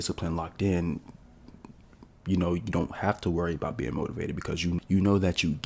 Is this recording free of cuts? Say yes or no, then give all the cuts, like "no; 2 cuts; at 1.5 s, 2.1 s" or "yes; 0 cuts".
no; 1 cut; at 4.8 s